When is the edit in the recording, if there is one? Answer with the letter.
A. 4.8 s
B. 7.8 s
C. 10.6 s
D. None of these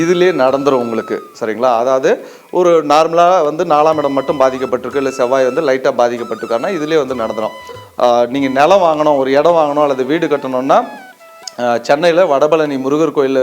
B